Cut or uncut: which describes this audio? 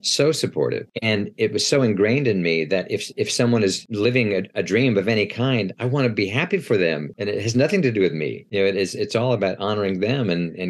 cut